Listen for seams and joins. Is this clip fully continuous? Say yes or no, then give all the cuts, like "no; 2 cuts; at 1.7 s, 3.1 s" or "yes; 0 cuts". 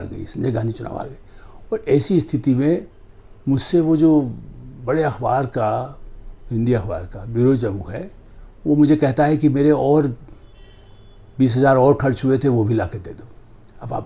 yes; 0 cuts